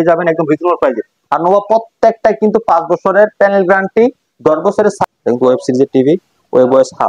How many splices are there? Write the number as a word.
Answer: one